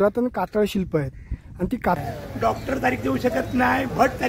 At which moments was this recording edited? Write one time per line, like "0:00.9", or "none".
0:02.0

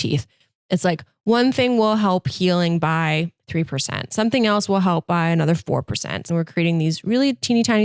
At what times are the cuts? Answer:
0:06.2

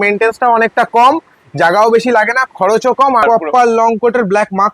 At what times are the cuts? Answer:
0:03.2

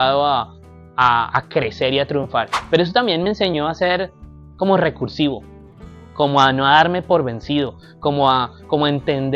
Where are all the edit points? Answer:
0:02.6

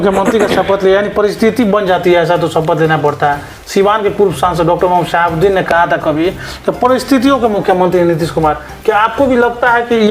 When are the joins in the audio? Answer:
none

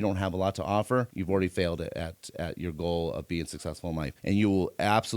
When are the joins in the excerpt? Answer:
0:04.1

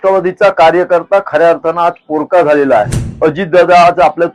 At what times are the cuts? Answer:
0:03.0

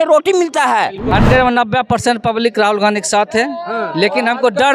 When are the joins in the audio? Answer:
0:01.1

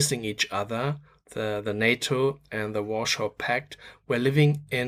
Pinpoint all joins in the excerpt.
none

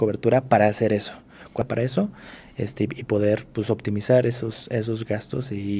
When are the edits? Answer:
0:01.6

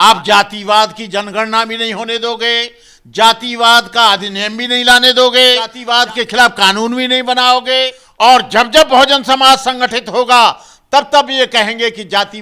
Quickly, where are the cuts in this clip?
0:05.8
0:08.0

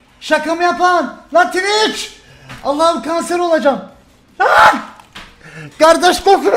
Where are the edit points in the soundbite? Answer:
0:02.3

